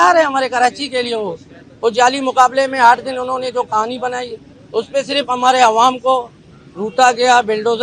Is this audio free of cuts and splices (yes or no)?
yes